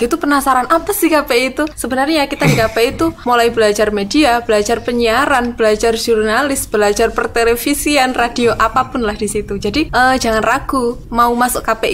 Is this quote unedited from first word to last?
no; 4 cuts; at 1.8 s, 3.2 s, 9.9 s, 11.0 s

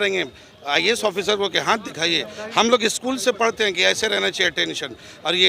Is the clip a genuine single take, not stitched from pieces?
yes; 0 cuts

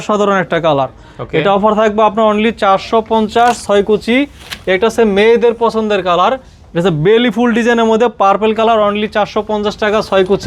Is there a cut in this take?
no; 0 cuts

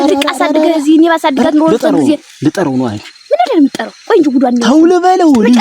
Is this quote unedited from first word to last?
yes; 0 cuts

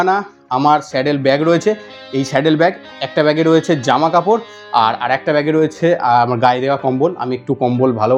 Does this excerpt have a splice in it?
no; 0 cuts

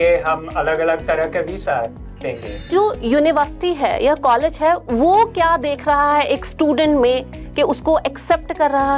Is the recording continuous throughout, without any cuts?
no; 1 cut; at 2.6 s

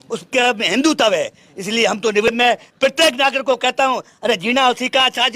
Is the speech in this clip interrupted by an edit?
yes; 1 cut; at 2.3 s

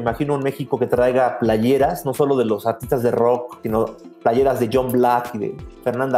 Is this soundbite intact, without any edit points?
no; 1 cut; at 3.5 s

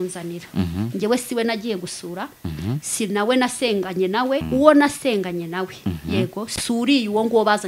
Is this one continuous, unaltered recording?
no; 1 cut; at 4.4 s

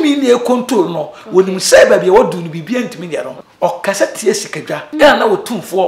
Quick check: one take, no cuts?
no; 2 cuts; at 3.4 s, 4.9 s

